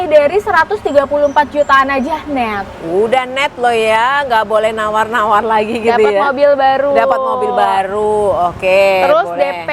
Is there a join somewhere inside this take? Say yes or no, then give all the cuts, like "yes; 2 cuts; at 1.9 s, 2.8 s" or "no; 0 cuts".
no; 0 cuts